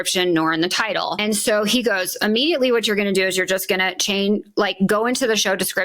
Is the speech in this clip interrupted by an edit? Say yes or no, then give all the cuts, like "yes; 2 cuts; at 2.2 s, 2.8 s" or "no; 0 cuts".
yes; 1 cut; at 1.2 s